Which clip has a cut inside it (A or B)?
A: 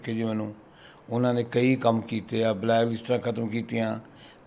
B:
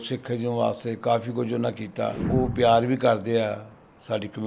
B